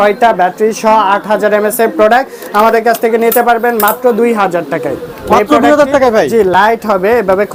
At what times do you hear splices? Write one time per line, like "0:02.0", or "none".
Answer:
none